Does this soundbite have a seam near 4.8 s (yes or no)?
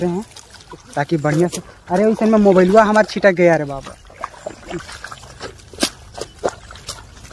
yes